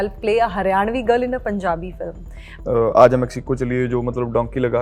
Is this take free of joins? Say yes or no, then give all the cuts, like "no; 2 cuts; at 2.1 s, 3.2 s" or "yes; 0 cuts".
no; 1 cut; at 2.5 s